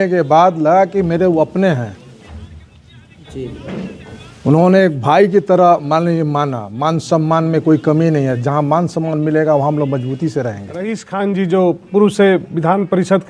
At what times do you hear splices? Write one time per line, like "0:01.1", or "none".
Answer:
0:11.0